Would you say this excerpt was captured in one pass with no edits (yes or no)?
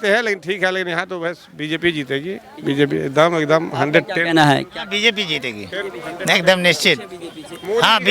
yes